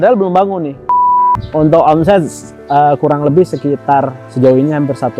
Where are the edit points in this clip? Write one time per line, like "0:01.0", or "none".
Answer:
0:00.9
0:04.2